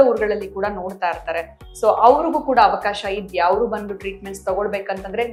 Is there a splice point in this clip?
no; 0 cuts

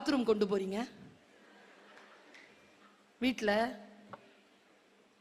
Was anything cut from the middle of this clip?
no; 0 cuts

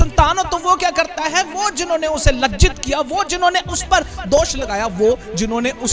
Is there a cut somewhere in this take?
no; 0 cuts

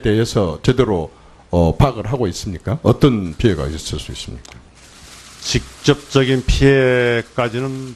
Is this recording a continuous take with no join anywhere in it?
no; 1 cut; at 5.9 s

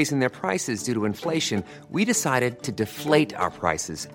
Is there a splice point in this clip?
no; 0 cuts

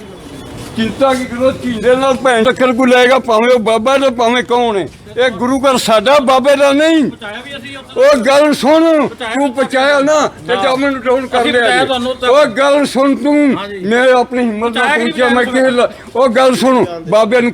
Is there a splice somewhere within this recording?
yes; 1 cut; at 2.4 s

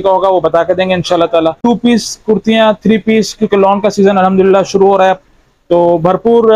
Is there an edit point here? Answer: yes; 1 cut; at 1.6 s

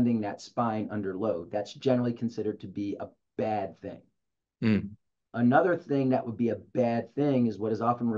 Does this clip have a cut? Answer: no; 0 cuts

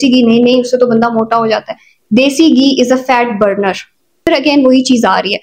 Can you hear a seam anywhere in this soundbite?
yes; 1 cut; at 4.2 s

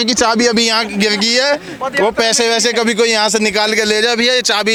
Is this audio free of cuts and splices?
yes; 0 cuts

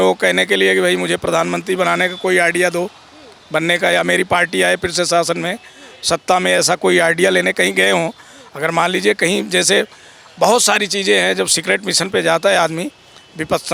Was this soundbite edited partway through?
no; 0 cuts

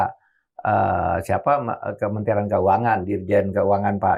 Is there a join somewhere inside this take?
no; 0 cuts

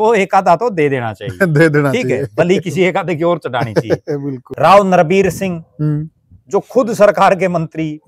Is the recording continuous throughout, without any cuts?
no; 1 cut; at 4.4 s

